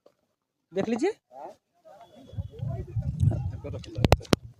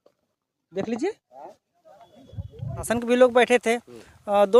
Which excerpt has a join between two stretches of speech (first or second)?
second